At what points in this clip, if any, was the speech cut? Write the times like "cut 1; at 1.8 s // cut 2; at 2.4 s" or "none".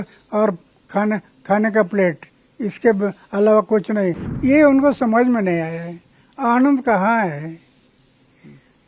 cut 1; at 4.3 s